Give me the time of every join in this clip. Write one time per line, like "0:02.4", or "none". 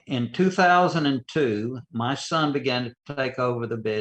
0:01.9

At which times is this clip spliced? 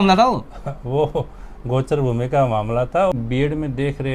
0:03.1

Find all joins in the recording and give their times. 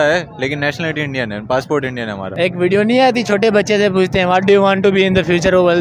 0:02.3

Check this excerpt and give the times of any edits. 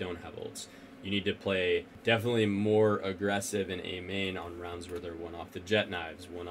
0:01.9

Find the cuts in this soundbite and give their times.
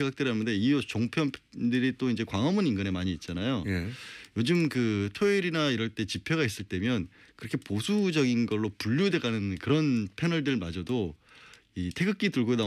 none

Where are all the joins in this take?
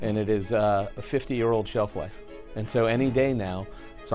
0:00.9

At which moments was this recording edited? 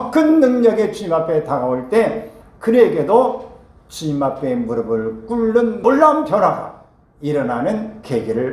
0:05.8

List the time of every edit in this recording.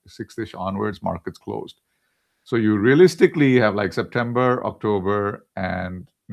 none

